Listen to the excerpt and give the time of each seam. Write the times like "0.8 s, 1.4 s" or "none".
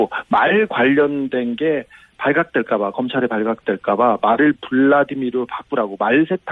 4.6 s

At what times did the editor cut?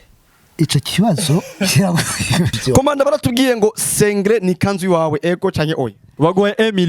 2.6 s, 6.1 s

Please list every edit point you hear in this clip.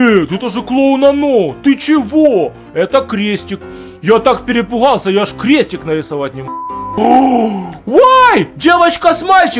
6.8 s

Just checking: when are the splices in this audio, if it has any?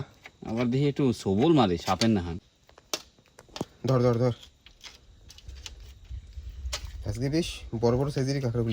2.3 s

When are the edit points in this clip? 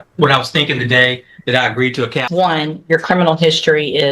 2.2 s

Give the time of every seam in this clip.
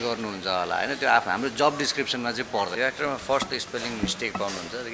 2.7 s

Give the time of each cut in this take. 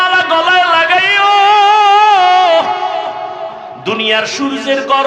3.6 s

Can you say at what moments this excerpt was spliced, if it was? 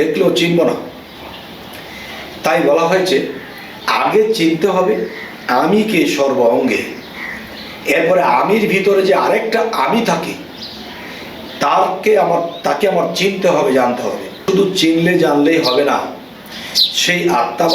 14.4 s

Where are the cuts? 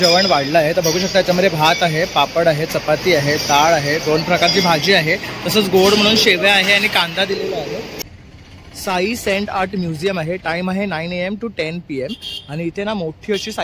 8.0 s

